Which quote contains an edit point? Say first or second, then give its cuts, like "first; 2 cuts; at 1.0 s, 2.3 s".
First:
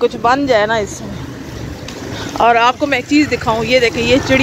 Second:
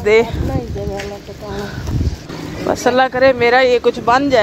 second; 1 cut; at 2.3 s